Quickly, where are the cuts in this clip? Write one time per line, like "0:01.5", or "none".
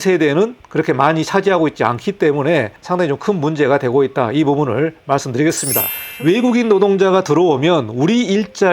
0:02.8
0:06.0